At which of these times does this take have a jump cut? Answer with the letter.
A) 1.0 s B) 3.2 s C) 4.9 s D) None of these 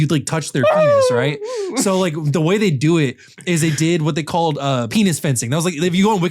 C